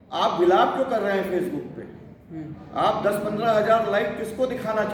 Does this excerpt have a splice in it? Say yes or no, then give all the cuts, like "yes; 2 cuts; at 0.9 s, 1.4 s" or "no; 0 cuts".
no; 0 cuts